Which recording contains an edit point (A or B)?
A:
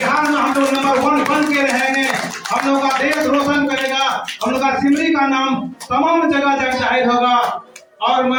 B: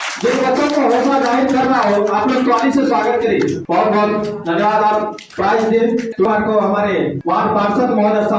B